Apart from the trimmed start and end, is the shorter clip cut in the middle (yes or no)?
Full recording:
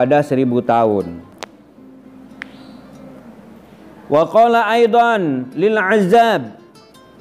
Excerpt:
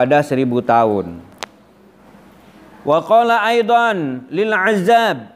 yes